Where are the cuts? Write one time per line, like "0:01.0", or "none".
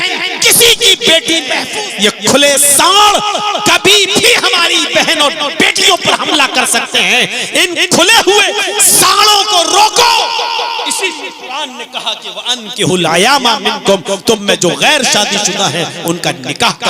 0:01.6